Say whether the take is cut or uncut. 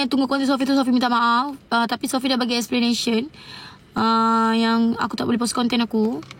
uncut